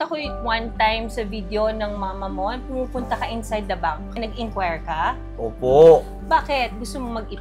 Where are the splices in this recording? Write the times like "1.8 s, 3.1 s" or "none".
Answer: none